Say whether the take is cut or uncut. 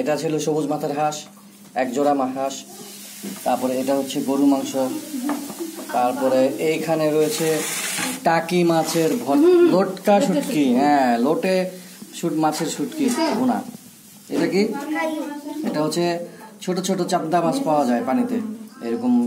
uncut